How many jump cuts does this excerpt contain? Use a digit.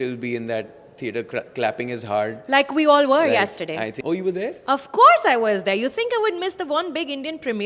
1